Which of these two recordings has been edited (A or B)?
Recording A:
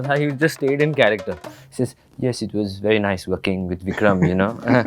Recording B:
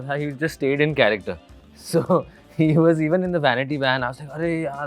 A